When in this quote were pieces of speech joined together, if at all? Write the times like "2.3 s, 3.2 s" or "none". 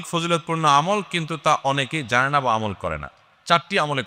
none